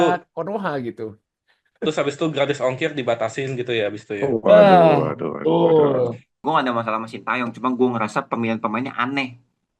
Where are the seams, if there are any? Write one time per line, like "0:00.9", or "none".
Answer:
0:06.3